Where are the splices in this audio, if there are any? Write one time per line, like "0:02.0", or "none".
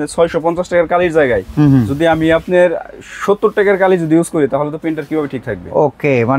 none